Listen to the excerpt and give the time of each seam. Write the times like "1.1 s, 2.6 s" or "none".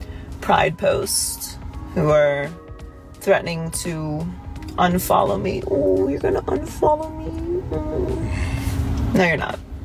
none